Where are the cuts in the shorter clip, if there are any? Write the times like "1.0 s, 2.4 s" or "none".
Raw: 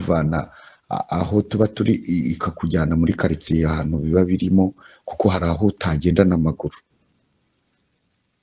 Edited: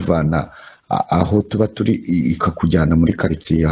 none